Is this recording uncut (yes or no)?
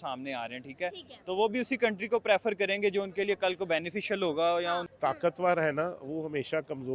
no